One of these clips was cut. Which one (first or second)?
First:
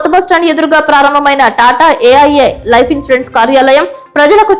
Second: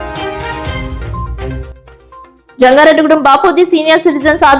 second